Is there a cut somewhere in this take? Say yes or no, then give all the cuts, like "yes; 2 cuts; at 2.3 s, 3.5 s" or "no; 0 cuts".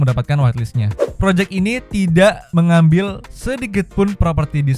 yes; 2 cuts; at 1.0 s, 2.4 s